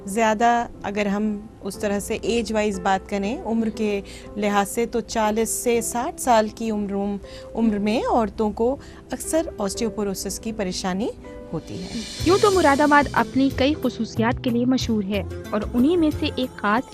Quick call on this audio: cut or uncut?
cut